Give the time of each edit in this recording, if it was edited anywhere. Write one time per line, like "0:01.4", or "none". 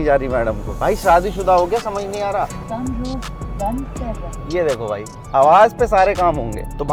none